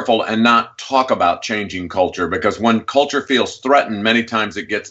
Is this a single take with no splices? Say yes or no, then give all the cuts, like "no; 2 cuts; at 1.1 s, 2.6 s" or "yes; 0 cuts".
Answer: yes; 0 cuts